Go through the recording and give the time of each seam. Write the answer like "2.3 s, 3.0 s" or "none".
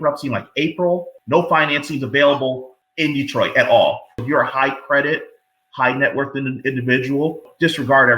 1.1 s, 4.1 s